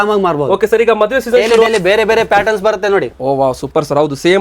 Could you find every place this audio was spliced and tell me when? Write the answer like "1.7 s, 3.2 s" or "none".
1.7 s